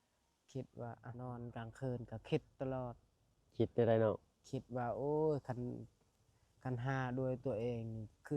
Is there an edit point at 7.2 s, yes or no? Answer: no